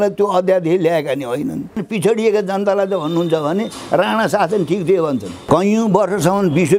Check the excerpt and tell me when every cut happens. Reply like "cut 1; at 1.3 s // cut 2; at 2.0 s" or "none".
cut 1; at 1.8 s // cut 2; at 5.4 s